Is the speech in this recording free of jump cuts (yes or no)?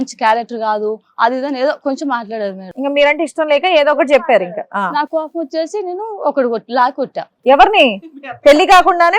yes